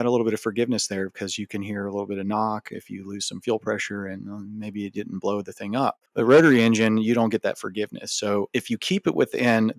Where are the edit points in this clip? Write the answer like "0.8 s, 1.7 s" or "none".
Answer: 6.0 s